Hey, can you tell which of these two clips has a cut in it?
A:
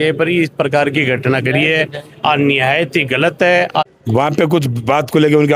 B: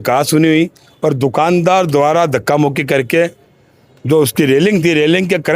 A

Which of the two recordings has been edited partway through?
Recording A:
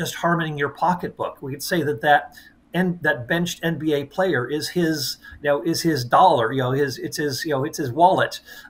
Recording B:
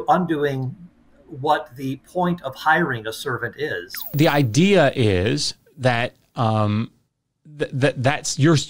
B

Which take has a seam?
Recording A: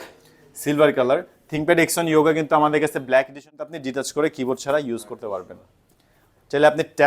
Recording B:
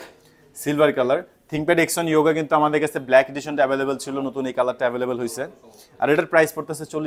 A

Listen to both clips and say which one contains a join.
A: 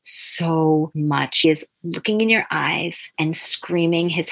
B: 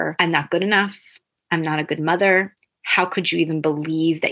A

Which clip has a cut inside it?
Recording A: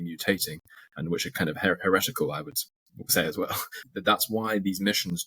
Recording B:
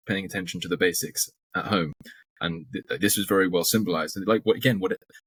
A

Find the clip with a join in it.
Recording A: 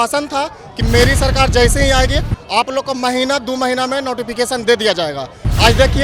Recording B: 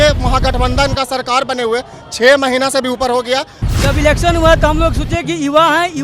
B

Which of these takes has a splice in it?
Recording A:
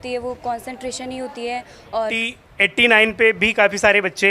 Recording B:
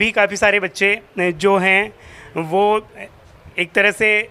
A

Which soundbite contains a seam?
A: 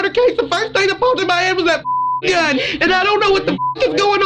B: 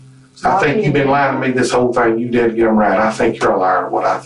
A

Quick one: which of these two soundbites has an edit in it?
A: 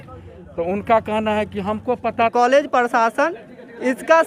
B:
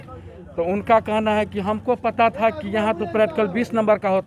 A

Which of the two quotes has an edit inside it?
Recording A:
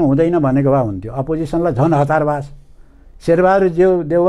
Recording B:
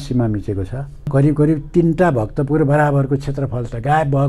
B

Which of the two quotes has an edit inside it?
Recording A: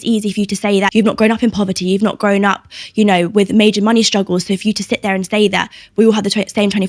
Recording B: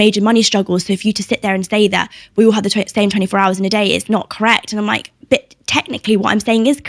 A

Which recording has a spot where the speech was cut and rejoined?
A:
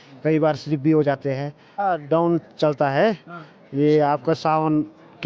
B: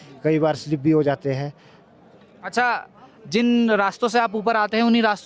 A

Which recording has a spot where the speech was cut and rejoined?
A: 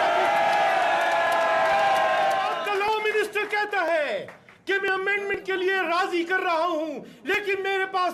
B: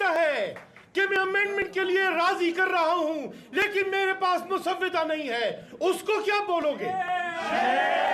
A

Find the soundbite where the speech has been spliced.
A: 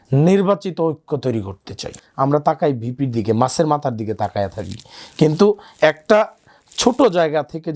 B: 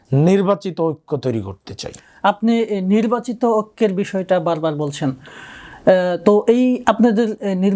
A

